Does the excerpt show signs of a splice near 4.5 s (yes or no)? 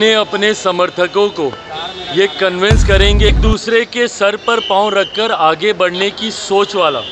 no